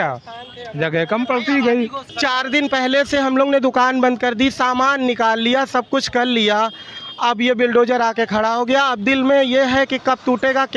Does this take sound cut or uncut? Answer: cut